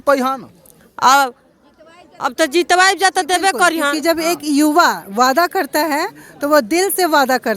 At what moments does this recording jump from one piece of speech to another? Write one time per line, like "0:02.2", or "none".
0:03.9